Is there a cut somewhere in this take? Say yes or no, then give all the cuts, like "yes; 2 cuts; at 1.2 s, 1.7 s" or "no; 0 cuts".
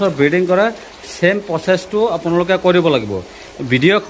no; 0 cuts